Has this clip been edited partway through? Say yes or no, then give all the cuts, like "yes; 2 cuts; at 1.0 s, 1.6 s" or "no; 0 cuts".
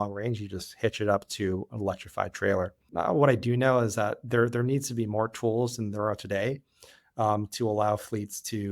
yes; 1 cut; at 2.9 s